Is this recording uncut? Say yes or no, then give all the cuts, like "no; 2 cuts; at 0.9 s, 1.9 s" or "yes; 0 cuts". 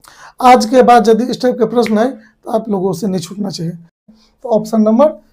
no; 1 cut; at 4.1 s